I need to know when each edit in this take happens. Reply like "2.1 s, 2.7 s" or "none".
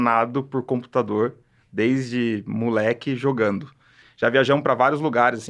4.0 s

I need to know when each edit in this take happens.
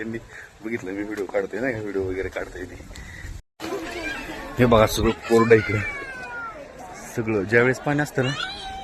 3.6 s

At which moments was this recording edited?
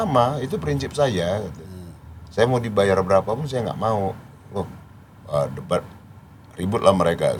none

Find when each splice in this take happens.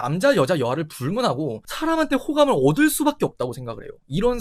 1.7 s

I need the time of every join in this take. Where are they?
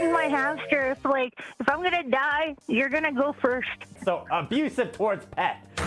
none

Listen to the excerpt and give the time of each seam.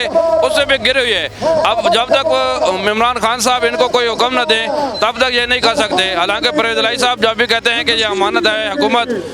none

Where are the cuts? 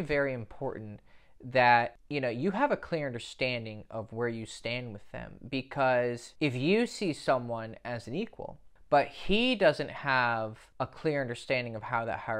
8.6 s

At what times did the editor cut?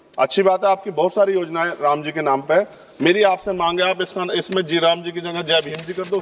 none

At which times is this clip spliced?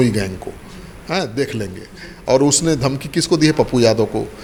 none

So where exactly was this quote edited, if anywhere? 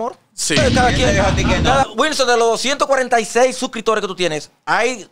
1.9 s

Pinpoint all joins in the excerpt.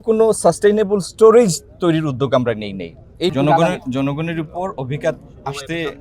3.3 s

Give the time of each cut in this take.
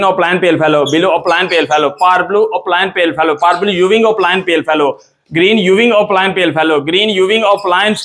none

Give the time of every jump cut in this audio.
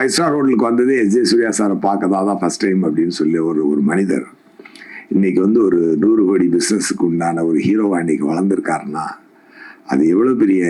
none

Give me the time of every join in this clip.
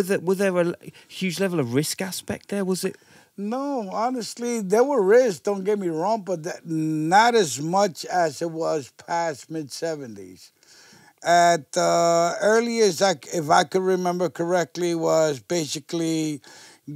none

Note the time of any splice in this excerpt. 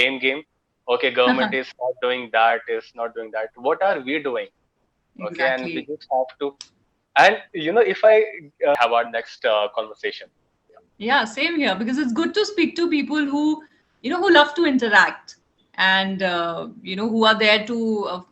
8.7 s

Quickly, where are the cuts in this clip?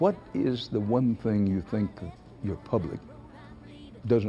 none

